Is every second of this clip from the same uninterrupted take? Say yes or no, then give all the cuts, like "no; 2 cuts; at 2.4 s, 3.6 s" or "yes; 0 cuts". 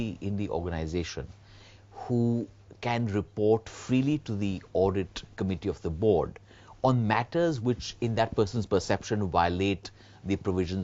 no; 1 cut; at 1.9 s